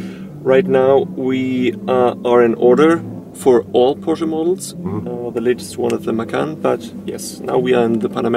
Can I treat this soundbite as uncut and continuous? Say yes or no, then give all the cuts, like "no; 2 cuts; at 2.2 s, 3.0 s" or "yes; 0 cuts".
no; 1 cut; at 5.1 s